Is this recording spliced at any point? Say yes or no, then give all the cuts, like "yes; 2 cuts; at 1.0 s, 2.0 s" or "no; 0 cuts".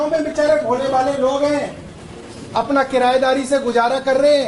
no; 0 cuts